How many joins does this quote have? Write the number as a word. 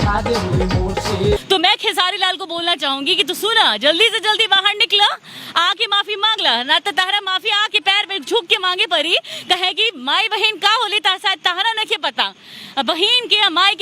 one